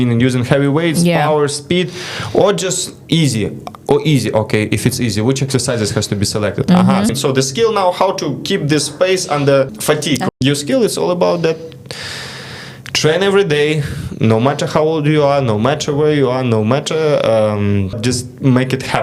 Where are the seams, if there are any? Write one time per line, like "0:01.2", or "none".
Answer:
0:07.1
0:10.0
0:18.0